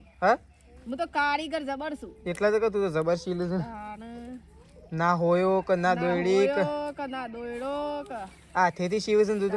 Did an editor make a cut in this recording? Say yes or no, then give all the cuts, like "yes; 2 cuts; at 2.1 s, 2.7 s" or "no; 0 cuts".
no; 0 cuts